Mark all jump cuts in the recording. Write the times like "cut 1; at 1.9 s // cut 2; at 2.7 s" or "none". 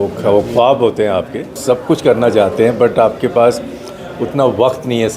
cut 1; at 1.6 s